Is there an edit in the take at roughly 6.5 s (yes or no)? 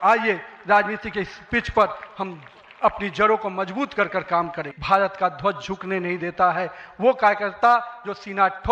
no